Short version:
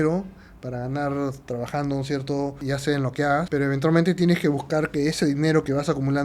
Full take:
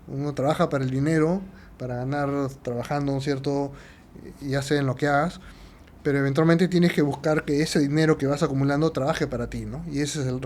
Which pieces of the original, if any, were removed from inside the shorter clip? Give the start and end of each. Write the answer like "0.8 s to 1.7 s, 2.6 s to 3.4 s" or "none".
3.7 s to 4.4 s, 5.3 s to 6.0 s